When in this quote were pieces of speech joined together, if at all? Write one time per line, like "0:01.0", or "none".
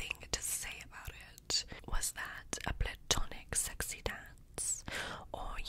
0:01.8